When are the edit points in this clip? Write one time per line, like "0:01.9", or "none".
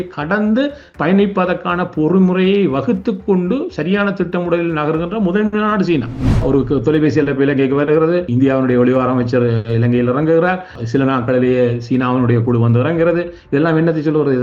0:06.2
0:08.3
0:10.7